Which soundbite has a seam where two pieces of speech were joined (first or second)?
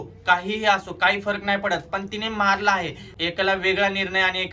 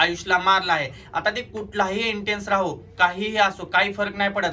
first